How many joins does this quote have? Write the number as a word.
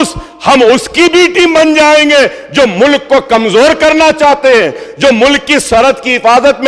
zero